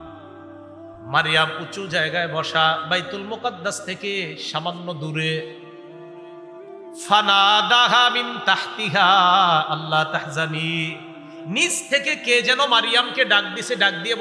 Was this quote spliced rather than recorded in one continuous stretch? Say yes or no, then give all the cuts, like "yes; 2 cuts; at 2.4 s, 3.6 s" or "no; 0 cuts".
yes; 2 cuts; at 5.5 s, 6.9 s